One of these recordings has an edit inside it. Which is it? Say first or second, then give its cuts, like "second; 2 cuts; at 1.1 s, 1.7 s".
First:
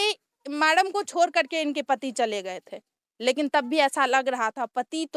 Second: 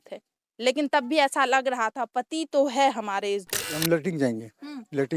second; 1 cut; at 3.7 s